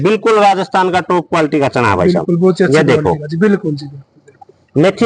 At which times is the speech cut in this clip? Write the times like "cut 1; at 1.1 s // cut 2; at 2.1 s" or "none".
none